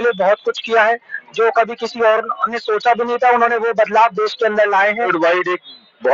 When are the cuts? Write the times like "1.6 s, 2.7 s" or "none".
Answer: 5.1 s